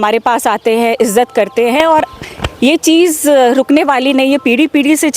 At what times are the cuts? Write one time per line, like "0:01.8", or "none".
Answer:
none